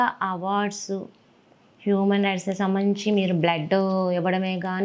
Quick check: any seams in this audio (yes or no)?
no